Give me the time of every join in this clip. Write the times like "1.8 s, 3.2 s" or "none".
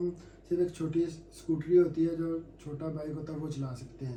none